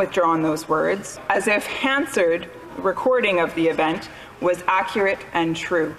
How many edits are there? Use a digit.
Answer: 1